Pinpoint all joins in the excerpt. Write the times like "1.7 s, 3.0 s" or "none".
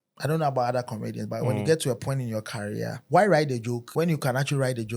3.0 s, 3.8 s